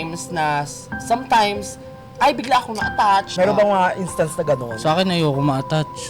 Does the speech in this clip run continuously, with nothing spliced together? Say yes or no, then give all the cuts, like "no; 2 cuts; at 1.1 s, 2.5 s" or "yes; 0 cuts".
no; 1 cut; at 3.3 s